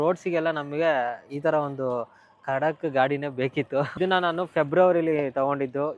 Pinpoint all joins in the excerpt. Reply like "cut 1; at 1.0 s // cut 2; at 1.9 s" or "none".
cut 1; at 3.9 s